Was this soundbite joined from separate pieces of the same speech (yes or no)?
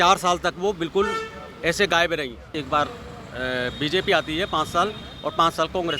yes